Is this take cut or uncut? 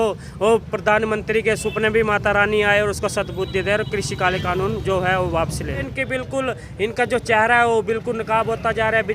cut